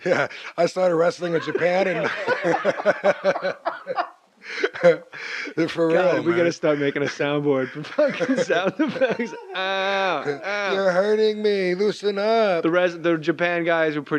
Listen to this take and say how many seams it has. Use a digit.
1